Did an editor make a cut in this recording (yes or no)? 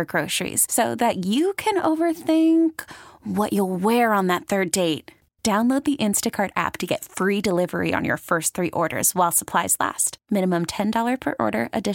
no